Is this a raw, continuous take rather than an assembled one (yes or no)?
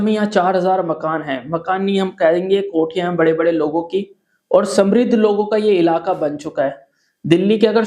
yes